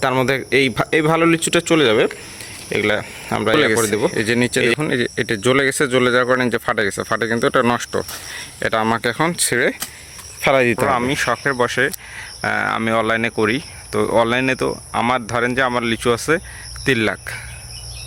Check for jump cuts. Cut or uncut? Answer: cut